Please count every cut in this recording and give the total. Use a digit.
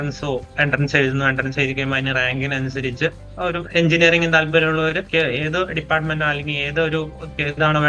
2